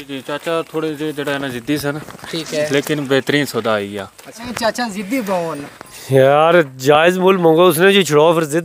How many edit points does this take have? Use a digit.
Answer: 1